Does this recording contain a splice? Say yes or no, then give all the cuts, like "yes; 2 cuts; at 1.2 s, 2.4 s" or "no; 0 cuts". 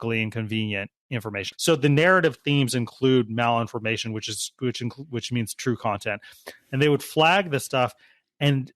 yes; 1 cut; at 1.4 s